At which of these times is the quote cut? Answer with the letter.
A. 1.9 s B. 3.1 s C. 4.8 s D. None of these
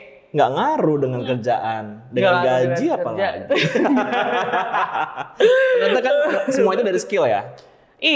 D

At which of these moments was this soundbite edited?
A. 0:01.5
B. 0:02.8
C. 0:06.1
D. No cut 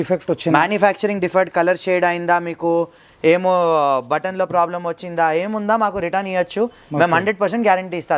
D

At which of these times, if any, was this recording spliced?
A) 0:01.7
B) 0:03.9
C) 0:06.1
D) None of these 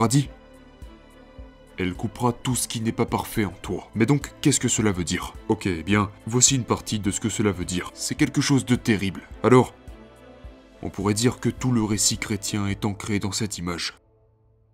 D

